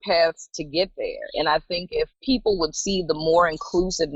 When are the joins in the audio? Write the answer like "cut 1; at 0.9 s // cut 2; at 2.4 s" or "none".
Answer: cut 1; at 2.2 s